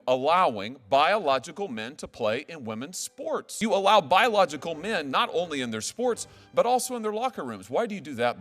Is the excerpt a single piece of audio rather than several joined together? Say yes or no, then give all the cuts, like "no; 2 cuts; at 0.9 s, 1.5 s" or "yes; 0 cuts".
no; 1 cut; at 3.6 s